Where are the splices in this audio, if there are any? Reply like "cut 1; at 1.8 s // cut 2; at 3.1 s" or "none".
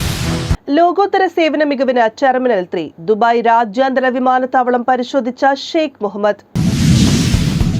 cut 1; at 6.5 s